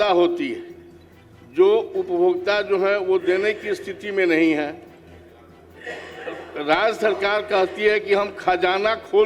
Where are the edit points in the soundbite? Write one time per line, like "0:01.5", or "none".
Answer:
none